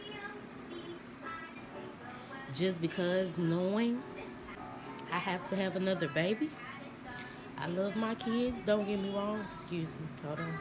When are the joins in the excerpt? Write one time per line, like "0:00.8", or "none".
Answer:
0:01.6
0:04.5